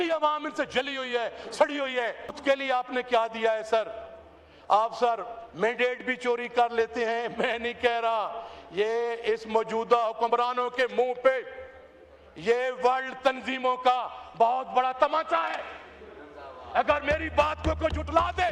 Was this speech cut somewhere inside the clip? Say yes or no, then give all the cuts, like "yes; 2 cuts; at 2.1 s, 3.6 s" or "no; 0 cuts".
no; 0 cuts